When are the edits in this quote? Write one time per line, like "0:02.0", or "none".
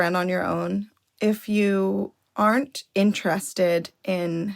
0:01.0